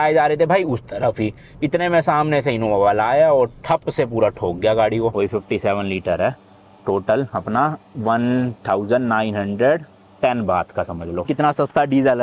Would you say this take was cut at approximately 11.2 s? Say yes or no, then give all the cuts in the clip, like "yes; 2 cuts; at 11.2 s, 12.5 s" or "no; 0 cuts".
yes; 2 cuts; at 5.1 s, 11.2 s